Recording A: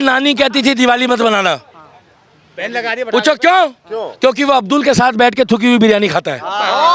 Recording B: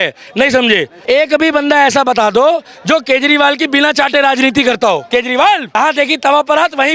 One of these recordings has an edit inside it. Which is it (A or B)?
B